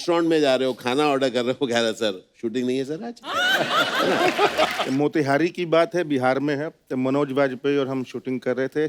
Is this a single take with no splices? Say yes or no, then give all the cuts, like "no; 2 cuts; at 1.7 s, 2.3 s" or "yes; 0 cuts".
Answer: no; 1 cut; at 4.8 s